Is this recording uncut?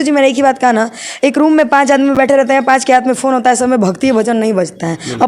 yes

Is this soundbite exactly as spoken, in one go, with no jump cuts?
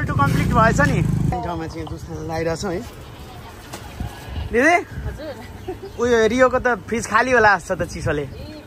yes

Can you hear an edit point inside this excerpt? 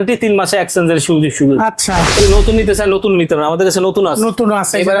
yes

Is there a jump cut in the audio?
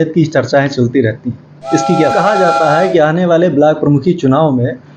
yes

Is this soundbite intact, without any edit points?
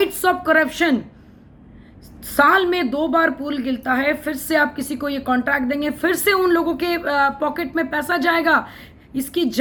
yes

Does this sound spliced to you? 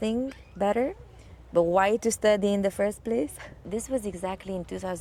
no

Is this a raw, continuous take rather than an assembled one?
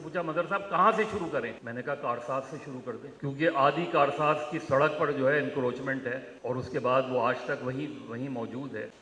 no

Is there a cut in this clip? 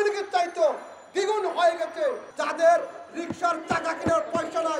yes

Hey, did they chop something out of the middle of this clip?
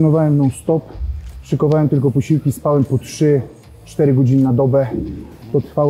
no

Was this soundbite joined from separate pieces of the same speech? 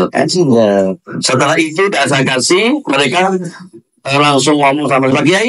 no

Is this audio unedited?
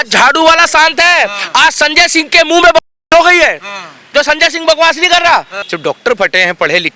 no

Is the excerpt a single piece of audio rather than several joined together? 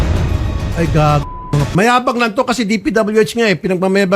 no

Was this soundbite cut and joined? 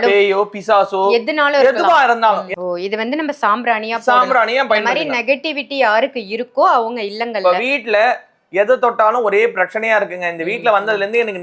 yes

